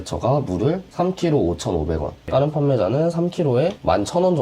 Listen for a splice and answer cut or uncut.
cut